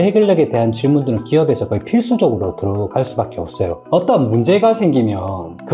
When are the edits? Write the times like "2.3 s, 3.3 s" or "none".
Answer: 3.8 s